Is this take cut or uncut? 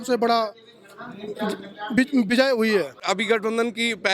cut